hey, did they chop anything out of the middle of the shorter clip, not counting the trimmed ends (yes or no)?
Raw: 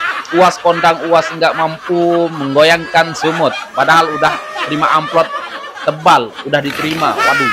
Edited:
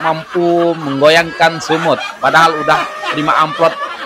no